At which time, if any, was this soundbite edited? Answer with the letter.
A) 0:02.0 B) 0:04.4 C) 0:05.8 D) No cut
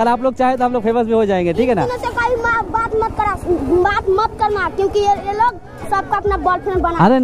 D